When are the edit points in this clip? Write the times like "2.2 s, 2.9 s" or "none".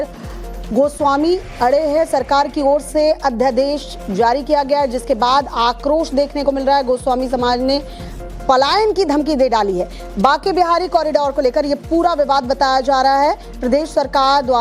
none